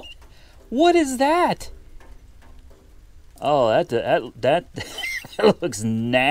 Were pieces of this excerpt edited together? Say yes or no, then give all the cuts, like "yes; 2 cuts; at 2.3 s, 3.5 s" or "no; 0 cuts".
no; 0 cuts